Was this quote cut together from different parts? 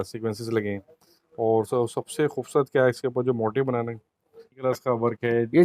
yes; 1 cut; at 4.6 s

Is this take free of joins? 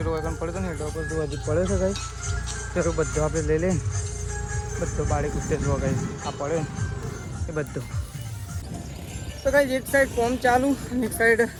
yes; 0 cuts

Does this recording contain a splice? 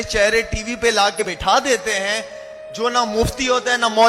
yes; 1 cut; at 1.2 s

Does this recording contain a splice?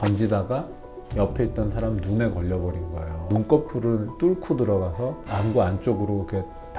yes; 2 cuts; at 3.3 s, 5.2 s

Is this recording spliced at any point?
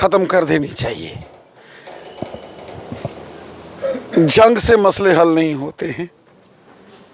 no; 0 cuts

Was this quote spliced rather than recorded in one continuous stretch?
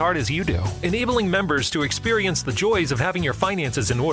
no; 0 cuts

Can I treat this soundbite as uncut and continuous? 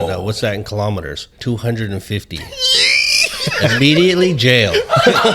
no; 1 cut; at 1.4 s

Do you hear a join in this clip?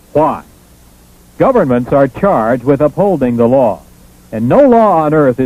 no; 0 cuts

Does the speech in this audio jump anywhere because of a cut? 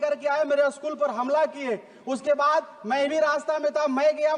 no; 0 cuts

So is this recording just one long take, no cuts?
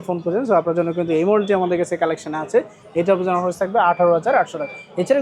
yes; 0 cuts

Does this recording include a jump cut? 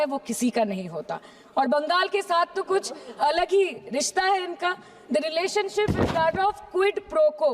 no; 0 cuts

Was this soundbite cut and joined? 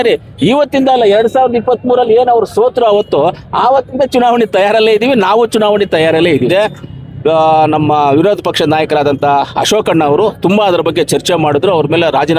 yes; 1 cut; at 6.5 s

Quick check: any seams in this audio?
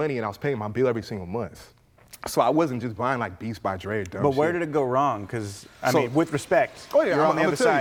no; 0 cuts

